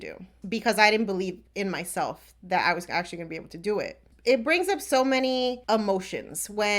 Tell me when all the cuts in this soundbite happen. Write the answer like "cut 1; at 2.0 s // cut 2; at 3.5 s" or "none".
cut 1; at 4.1 s // cut 2; at 5.6 s